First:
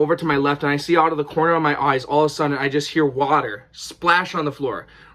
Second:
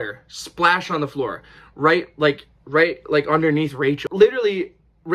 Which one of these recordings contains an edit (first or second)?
second